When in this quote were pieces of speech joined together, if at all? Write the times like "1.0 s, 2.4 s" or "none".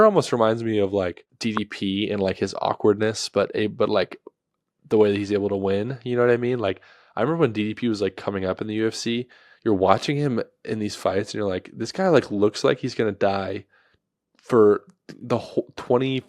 1.3 s